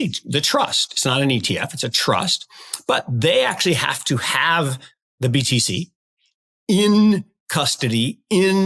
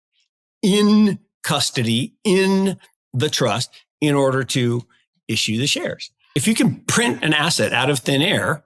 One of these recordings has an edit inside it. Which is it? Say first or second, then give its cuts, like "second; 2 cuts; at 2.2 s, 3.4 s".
second; 1 cut; at 6.3 s